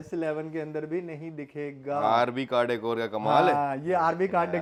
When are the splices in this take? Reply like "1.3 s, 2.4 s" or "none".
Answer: none